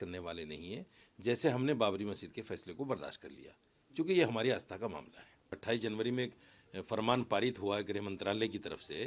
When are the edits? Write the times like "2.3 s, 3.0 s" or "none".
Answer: 5.5 s